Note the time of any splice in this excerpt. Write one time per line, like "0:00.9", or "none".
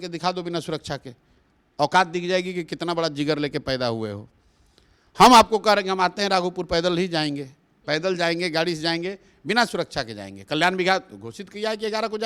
none